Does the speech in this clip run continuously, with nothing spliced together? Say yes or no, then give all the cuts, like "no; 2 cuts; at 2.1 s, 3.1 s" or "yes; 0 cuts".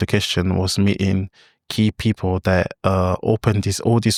yes; 0 cuts